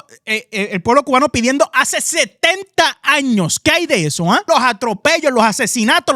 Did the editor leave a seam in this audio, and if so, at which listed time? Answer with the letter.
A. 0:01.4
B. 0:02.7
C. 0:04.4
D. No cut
C